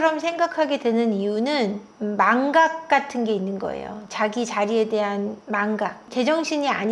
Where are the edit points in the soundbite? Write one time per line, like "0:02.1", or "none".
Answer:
none